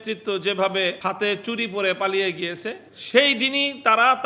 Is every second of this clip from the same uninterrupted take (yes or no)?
no